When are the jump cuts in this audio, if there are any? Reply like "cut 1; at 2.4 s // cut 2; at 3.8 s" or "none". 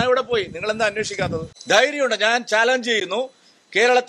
cut 1; at 1.5 s